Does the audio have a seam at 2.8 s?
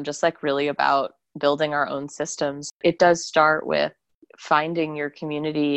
yes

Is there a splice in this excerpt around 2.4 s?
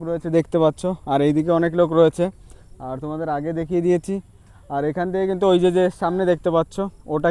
no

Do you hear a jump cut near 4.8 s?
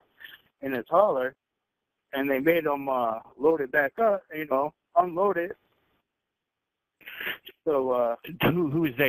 yes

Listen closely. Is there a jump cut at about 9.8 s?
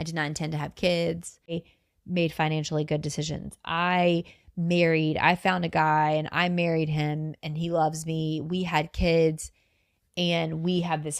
no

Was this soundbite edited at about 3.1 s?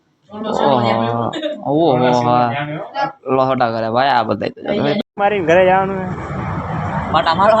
no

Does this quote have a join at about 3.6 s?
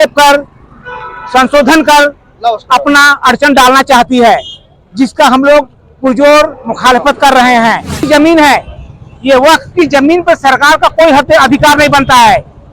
no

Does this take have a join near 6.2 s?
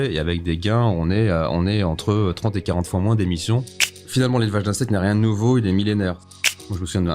yes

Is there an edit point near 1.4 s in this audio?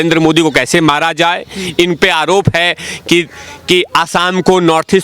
no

